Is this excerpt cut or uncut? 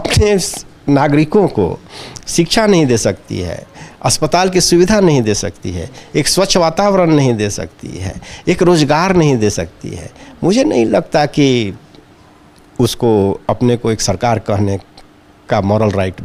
uncut